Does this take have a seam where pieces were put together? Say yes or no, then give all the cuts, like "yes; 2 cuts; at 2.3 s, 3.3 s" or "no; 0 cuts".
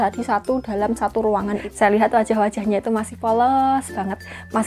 yes; 1 cut; at 1.5 s